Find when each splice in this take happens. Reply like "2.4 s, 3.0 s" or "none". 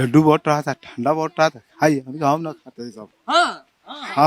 none